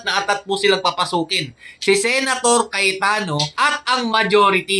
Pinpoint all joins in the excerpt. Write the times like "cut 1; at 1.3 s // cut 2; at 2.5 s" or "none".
none